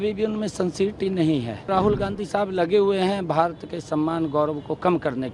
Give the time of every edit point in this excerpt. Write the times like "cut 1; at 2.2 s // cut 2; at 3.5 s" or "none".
cut 1; at 1.7 s

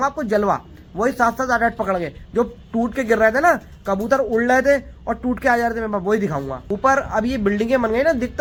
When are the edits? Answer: none

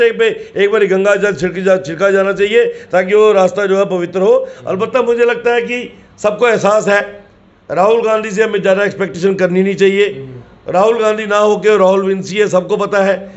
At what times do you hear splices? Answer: none

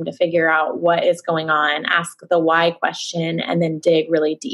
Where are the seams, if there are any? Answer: none

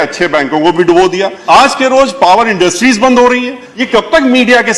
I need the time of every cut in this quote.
cut 1; at 1.3 s // cut 2; at 3.7 s

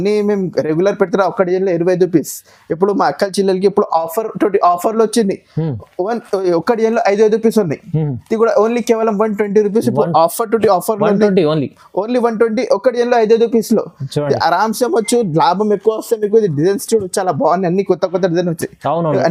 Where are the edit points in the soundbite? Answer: none

